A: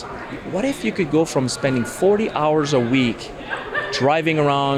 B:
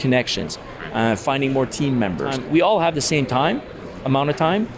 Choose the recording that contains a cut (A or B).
B